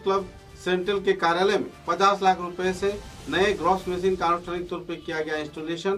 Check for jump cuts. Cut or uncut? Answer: uncut